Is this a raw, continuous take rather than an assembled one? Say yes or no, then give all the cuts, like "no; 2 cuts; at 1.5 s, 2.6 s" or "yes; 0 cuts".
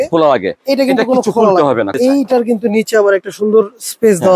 no; 1 cut; at 1.9 s